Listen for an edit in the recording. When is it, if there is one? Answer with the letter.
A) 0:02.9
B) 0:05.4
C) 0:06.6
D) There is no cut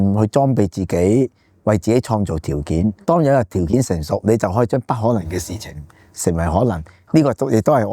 A